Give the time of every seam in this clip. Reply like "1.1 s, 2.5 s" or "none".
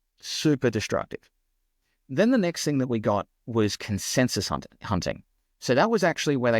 none